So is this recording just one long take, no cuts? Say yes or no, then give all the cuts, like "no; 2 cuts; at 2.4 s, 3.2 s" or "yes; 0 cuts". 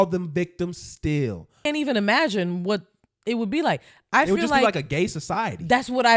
no; 1 cut; at 1.7 s